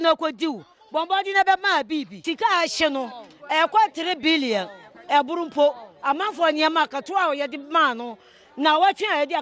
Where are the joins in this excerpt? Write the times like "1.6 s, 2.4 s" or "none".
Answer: 2.1 s

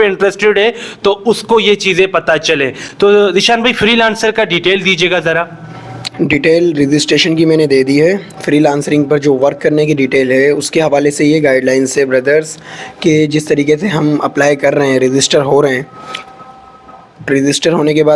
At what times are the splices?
none

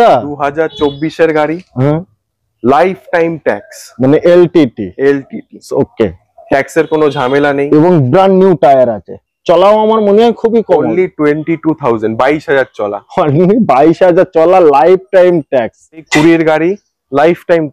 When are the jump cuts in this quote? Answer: 16.0 s

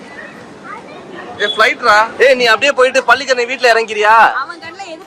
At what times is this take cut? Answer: 2.1 s

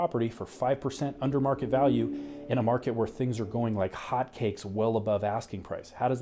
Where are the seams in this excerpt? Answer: none

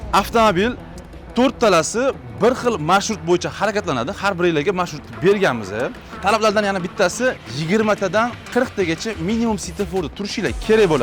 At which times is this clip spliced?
6.0 s, 7.5 s, 8.4 s

